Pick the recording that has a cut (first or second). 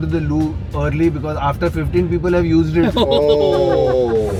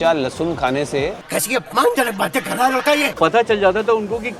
second